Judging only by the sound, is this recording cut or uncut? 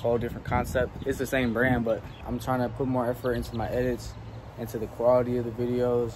cut